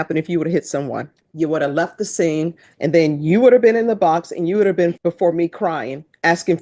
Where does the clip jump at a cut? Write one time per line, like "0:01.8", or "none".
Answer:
0:01.2
0:02.7
0:05.0

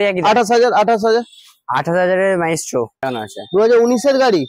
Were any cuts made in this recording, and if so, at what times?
0:03.0

